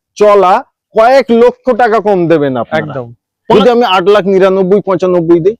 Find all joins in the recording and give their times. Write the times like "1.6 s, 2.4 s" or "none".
3.5 s